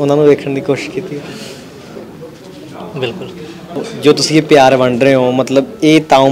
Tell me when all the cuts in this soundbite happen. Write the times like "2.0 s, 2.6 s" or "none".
3.8 s